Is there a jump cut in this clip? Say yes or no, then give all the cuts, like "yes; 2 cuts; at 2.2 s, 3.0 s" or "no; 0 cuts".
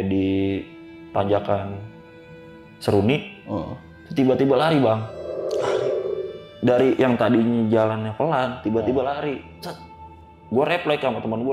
yes; 1 cut; at 0.9 s